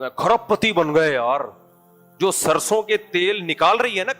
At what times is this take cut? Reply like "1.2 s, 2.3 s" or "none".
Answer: none